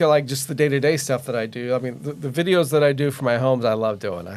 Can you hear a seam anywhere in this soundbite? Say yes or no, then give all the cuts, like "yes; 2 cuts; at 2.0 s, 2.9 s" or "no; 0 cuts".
no; 0 cuts